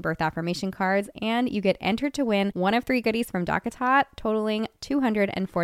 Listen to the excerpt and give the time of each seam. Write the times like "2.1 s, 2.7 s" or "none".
none